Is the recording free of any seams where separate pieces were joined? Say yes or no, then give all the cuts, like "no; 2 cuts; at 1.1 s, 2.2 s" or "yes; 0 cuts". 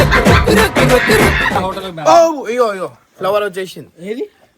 no; 1 cut; at 1.6 s